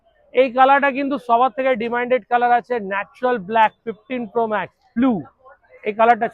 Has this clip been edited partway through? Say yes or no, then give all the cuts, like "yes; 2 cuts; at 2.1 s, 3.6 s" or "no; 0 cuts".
yes; 1 cut; at 4.8 s